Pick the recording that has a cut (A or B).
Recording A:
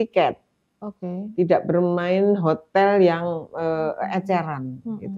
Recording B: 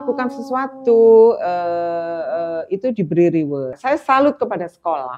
B